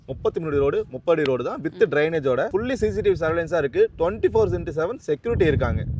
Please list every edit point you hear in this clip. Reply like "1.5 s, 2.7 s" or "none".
2.5 s